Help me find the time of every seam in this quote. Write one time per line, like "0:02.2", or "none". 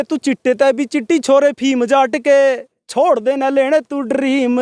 none